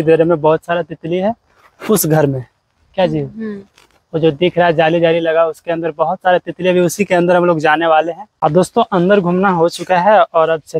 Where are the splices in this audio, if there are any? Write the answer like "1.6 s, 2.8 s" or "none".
8.2 s